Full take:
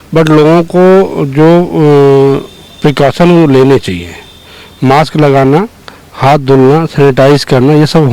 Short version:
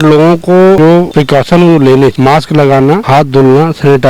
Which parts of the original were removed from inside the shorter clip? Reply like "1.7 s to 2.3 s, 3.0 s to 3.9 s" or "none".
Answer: 1.2 s to 2.6 s, 3.8 s to 4.8 s, 5.7 s to 6.2 s

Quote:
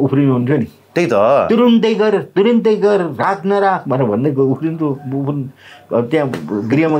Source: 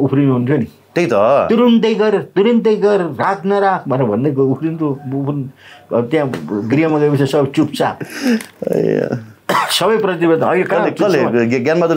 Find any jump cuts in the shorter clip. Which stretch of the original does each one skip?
none

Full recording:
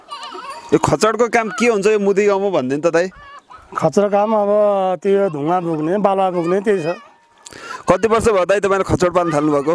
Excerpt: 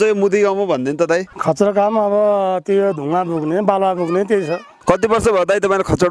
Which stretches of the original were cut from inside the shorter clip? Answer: 3.2 s to 3.7 s, 7.0 s to 7.7 s

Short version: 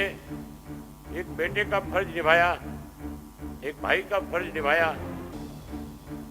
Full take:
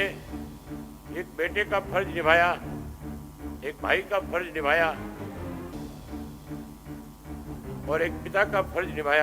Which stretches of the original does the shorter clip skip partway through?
5.0 s to 5.4 s

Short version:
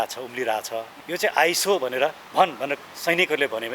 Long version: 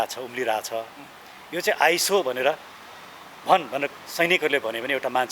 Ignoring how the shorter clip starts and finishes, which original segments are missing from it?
1.0 s to 1.4 s, 2.7 s to 3.3 s

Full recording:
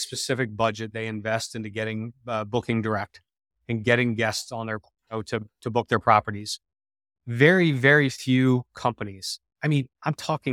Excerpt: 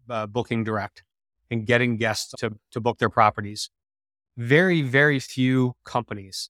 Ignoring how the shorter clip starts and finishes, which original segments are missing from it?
4.5 s to 5.2 s

